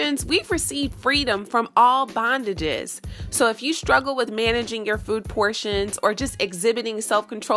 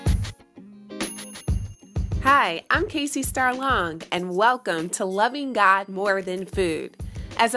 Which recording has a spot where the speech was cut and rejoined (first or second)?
second